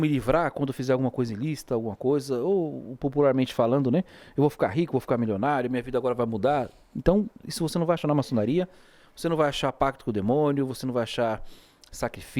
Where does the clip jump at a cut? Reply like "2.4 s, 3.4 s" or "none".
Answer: none